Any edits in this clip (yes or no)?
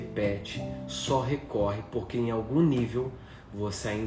no